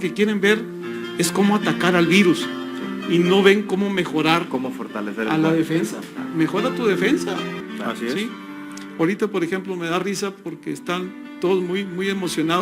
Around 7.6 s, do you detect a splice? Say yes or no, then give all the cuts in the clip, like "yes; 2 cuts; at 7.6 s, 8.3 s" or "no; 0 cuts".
yes; 1 cut; at 7.6 s